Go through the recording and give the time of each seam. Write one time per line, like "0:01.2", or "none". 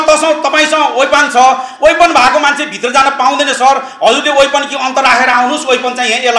none